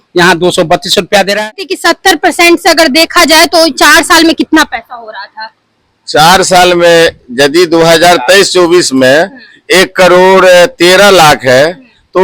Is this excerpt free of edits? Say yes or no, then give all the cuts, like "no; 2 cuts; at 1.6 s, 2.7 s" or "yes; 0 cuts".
no; 1 cut; at 1.7 s